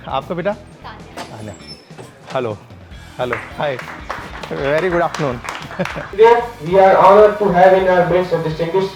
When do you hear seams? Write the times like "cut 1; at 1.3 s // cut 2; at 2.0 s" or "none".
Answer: cut 1; at 6.0 s